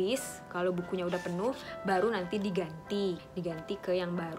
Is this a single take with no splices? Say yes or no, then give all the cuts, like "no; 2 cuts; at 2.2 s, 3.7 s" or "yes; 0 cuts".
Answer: no; 1 cut; at 3.3 s